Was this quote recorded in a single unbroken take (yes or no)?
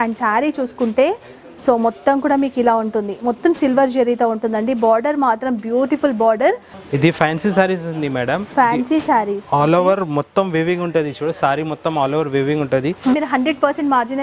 no